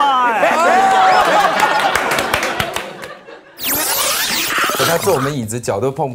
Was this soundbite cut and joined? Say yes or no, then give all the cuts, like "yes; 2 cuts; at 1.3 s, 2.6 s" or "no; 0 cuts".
no; 0 cuts